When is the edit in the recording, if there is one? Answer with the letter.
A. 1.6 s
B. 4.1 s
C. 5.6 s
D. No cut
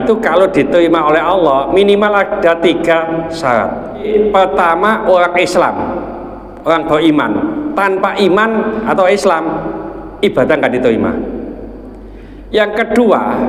B